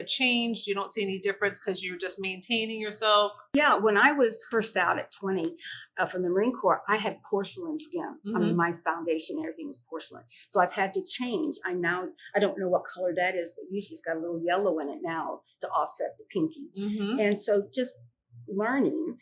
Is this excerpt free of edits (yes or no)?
no